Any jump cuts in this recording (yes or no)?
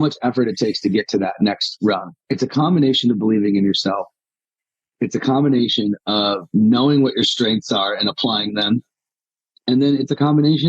yes